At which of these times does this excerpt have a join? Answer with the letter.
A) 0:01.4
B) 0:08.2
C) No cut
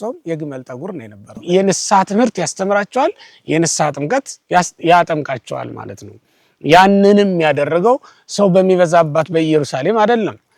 A